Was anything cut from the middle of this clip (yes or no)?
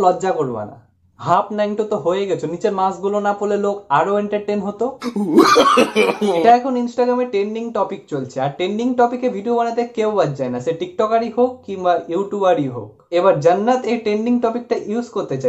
yes